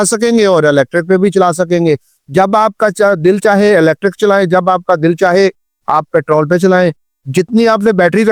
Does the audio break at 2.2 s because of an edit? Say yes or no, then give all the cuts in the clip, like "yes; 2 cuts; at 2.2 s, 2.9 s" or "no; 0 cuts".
no; 0 cuts